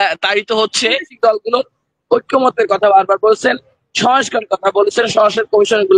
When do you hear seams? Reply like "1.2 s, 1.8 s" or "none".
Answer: 1.1 s